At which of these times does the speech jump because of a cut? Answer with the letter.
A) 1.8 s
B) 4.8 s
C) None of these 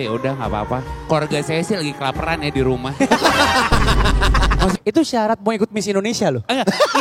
B